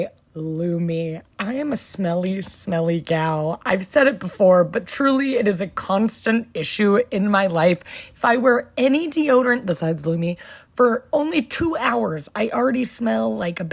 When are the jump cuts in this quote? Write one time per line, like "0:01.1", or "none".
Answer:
0:01.2

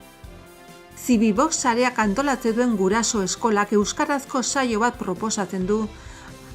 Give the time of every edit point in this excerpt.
0:01.0

